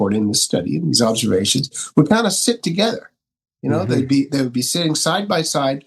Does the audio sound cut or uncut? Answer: uncut